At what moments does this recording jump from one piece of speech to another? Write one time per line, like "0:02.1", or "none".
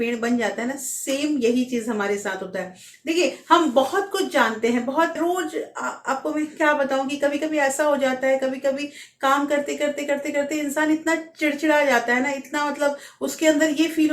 0:05.2